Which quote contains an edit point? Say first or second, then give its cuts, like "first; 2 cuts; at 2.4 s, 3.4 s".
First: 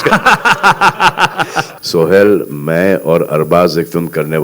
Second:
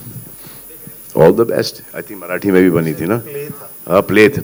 first; 1 cut; at 1.6 s